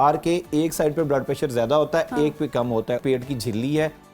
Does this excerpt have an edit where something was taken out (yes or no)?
yes